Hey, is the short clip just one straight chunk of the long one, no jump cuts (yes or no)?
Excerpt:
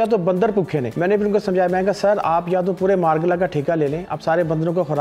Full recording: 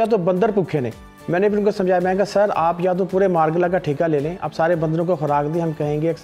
no